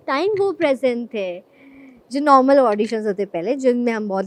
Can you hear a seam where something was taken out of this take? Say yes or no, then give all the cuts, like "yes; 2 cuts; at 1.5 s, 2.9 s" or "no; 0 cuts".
no; 0 cuts